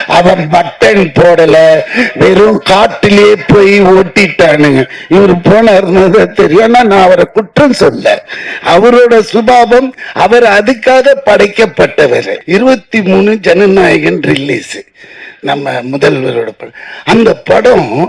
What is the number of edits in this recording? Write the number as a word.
one